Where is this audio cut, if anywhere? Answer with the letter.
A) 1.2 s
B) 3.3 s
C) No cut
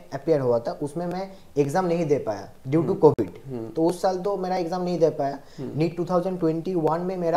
C